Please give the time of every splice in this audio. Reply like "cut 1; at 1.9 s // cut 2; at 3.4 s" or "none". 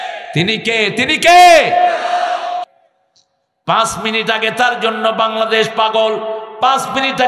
cut 1; at 2.7 s